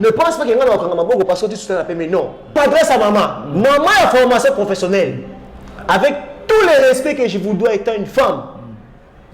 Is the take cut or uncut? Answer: cut